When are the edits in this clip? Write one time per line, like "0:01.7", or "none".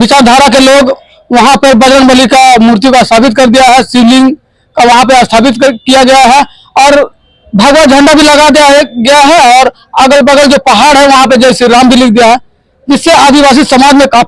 none